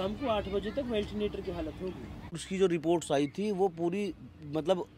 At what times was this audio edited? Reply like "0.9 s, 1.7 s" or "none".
2.5 s